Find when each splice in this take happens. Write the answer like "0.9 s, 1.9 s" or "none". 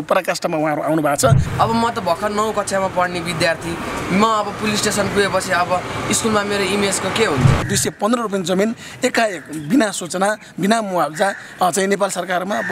1.4 s, 7.7 s